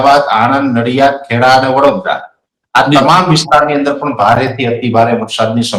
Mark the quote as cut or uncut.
uncut